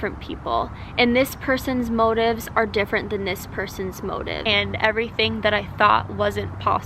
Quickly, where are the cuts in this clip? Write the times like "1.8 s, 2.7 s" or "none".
4.4 s